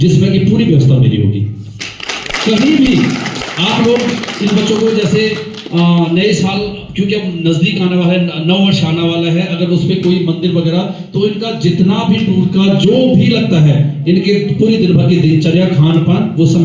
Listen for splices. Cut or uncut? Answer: uncut